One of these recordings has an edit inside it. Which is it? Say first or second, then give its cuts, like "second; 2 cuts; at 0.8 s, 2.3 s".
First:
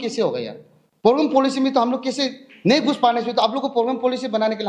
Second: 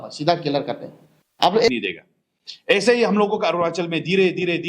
second; 1 cut; at 1.7 s